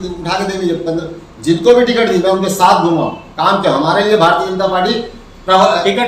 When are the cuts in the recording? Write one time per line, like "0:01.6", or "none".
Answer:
none